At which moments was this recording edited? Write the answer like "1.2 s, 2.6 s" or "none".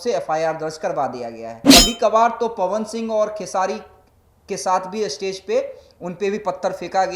1.6 s

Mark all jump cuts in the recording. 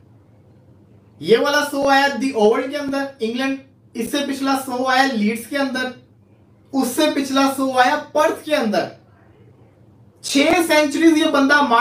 none

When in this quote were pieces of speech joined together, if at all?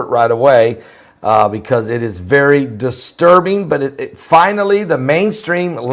3.3 s

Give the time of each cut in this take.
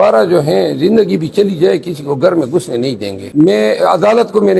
3.2 s

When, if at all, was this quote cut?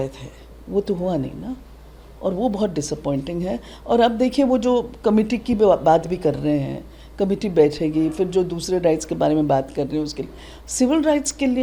none

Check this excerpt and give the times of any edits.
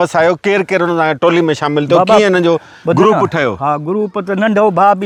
none

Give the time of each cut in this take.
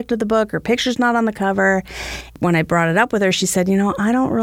2.3 s

